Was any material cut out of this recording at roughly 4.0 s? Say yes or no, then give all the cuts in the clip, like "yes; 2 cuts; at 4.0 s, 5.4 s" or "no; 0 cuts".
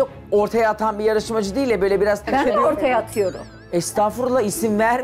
no; 1 cut; at 2.3 s